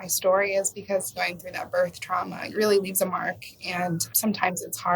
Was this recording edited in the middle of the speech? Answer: yes; 3 cuts; at 1.1 s, 2.4 s, 4.1 s

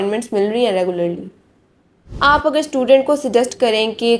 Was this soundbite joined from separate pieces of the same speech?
yes; 1 cut; at 2.0 s

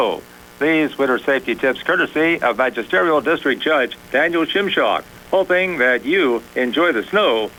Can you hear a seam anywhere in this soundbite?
no; 0 cuts

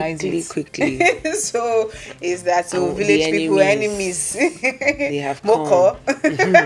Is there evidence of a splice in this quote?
no; 0 cuts

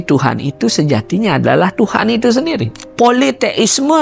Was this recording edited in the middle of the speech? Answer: yes; 1 cut; at 2.8 s

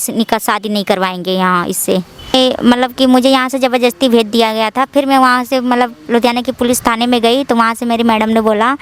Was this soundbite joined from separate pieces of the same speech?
yes; 1 cut; at 2.3 s

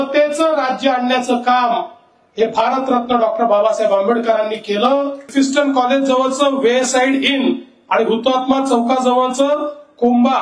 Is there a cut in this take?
yes; 1 cut; at 5.3 s

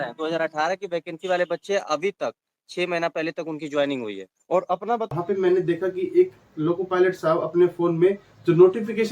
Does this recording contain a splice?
yes; 1 cut; at 5.1 s

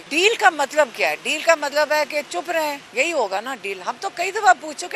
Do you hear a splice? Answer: yes; 1 cut; at 2.4 s

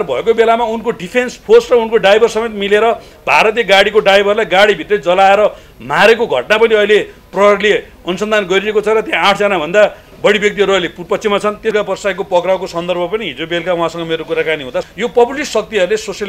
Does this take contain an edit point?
yes; 2 cuts; at 11.7 s, 14.9 s

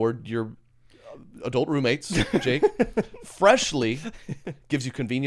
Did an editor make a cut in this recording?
no; 0 cuts

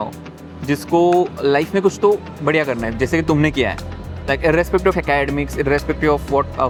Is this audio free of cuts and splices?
yes; 0 cuts

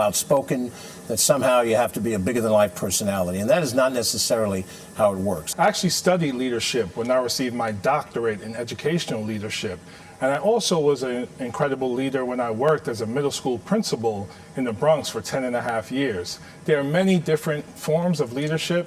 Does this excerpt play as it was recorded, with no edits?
yes; 0 cuts

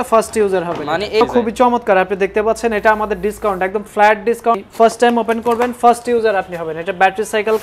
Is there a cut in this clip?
yes; 2 cuts; at 1.2 s, 4.6 s

